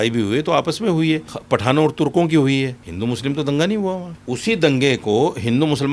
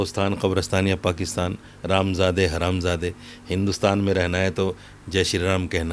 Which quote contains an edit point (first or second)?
first